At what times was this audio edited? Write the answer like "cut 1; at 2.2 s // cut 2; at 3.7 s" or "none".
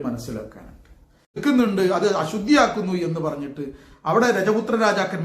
cut 1; at 1.4 s